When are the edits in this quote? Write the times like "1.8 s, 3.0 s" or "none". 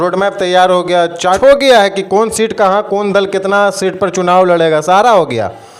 1.4 s